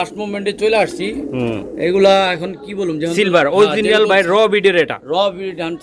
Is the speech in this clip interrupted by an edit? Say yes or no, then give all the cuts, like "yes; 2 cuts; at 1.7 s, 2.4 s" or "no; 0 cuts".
no; 0 cuts